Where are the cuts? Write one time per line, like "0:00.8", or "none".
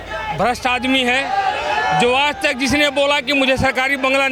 none